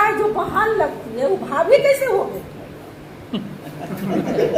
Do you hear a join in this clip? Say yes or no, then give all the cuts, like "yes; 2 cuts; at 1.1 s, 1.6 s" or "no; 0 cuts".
no; 0 cuts